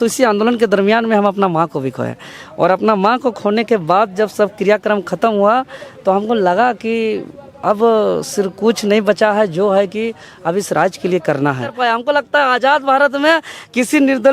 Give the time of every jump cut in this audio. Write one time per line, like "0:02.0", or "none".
0:11.7

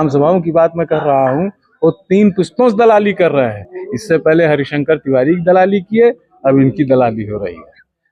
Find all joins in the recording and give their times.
none

